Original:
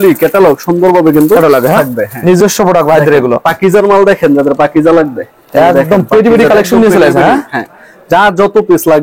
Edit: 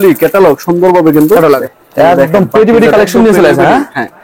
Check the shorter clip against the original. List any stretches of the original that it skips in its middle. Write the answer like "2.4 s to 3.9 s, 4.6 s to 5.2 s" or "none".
1.6 s to 5.2 s

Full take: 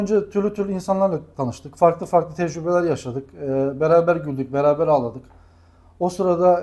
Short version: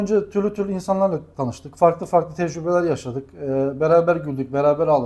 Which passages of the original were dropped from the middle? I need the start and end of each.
none

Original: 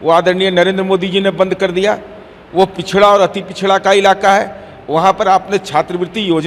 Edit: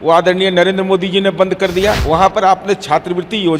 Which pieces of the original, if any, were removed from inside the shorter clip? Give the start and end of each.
2.0 s to 4.8 s

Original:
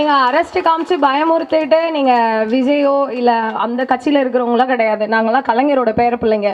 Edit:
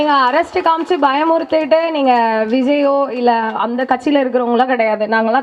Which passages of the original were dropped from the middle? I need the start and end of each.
none

